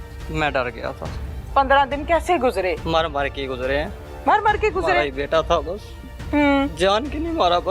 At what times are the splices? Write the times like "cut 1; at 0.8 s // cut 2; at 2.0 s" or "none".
cut 1; at 1.3 s